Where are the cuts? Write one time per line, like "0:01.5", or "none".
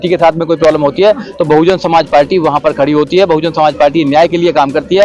none